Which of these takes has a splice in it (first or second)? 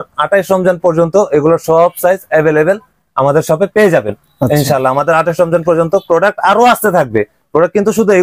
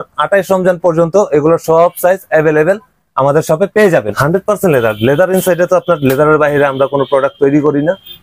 second